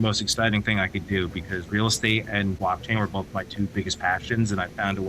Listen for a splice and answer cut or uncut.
cut